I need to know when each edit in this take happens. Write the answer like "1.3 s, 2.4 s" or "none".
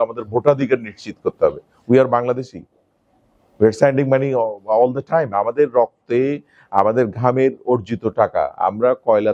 none

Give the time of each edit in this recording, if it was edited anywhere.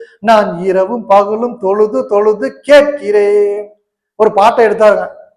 none

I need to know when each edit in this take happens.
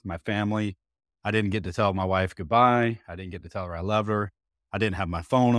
none

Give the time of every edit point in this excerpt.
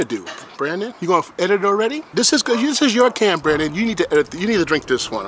none

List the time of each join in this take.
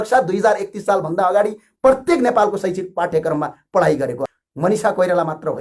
4.3 s

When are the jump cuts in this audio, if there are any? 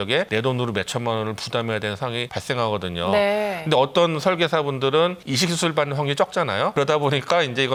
none

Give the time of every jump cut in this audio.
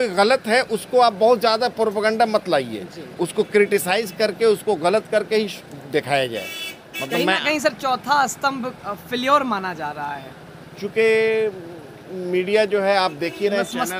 none

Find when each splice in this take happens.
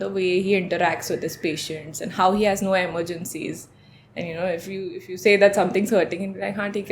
none

